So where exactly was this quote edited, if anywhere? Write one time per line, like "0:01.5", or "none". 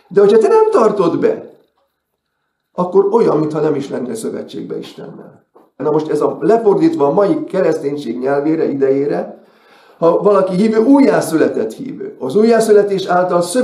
0:05.8

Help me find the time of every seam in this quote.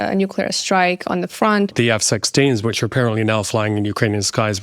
0:01.7

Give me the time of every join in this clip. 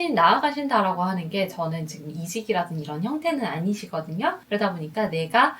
0:04.4

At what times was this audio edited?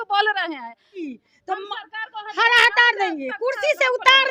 0:01.0

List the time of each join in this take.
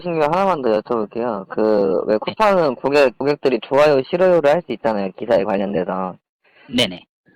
0:03.2

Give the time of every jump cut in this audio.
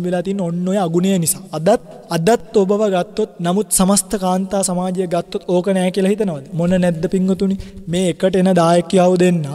0:02.0
0:03.3

